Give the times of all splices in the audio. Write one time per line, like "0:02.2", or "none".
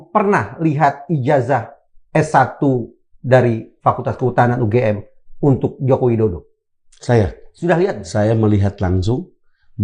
none